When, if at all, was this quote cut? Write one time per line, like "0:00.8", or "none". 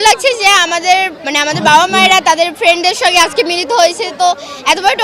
0:01.2